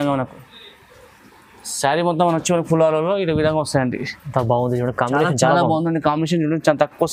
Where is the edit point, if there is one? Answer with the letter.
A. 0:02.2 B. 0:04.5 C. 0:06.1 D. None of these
D